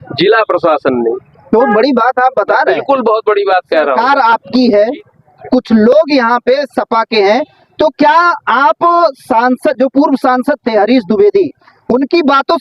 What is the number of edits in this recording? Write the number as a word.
one